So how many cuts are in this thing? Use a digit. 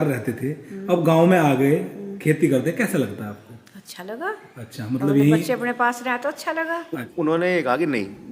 1